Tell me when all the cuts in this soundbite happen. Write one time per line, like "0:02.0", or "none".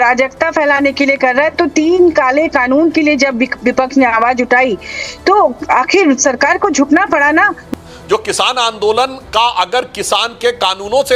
0:07.7